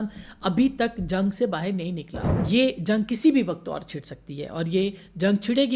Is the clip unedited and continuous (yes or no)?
no